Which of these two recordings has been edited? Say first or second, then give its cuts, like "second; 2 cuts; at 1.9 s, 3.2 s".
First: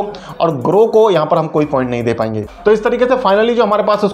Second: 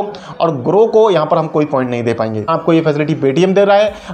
second; 1 cut; at 2.5 s